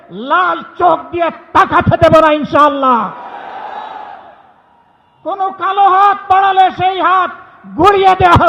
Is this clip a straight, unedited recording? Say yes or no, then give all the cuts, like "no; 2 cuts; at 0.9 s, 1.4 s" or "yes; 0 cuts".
yes; 0 cuts